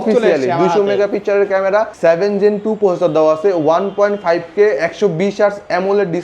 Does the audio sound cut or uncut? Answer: cut